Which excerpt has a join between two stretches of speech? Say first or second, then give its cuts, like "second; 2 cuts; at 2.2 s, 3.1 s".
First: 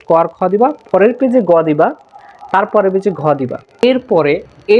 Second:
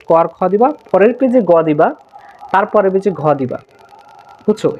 first; 1 cut; at 3.6 s